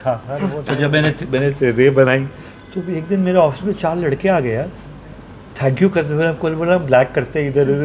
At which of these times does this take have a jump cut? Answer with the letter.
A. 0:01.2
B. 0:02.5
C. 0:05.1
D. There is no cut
D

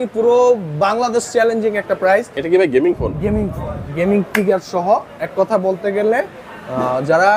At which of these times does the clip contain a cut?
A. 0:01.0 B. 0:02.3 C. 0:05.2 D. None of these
B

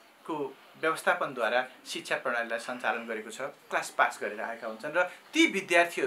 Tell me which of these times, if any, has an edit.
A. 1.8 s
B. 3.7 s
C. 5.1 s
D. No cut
B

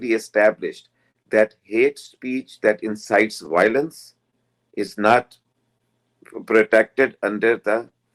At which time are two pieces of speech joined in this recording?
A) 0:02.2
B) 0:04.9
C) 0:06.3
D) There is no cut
D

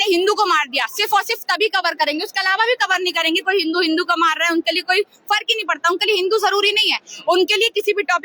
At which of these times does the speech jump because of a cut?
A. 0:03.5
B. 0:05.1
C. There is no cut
C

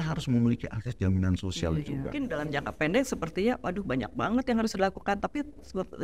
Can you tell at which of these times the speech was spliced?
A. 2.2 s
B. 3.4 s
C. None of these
A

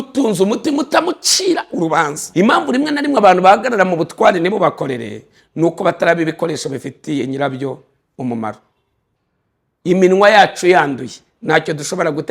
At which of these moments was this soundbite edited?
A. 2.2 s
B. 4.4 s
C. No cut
A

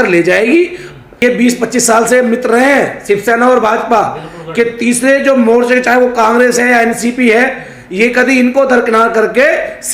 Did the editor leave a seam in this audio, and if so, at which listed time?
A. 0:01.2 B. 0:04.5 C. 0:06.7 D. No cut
A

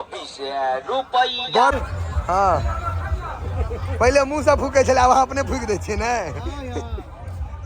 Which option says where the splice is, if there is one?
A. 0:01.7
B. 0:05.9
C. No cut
A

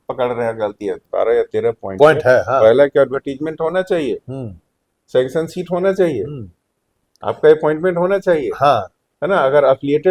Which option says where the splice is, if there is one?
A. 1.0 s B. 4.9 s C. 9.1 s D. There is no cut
A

